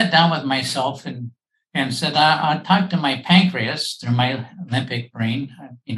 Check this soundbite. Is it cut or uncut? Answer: uncut